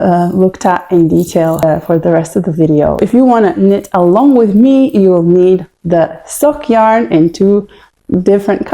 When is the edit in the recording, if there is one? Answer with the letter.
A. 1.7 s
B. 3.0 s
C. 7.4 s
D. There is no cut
B